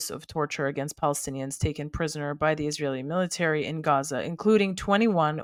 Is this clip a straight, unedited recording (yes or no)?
yes